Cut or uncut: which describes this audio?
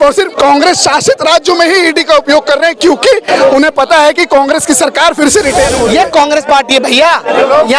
cut